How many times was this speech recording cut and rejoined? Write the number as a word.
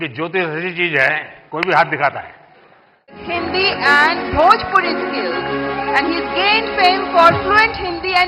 one